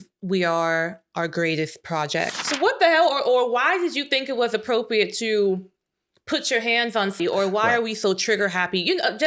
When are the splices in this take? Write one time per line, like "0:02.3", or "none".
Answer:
0:02.4
0:07.2